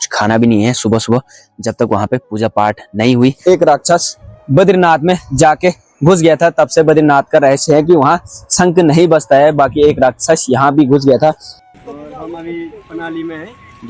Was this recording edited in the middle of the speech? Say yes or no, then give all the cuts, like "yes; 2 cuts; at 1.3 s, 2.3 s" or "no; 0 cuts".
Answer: yes; 2 cuts; at 3.4 s, 11.6 s